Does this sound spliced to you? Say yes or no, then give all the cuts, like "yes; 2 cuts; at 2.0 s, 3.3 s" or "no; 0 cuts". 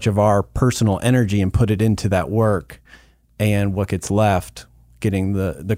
no; 0 cuts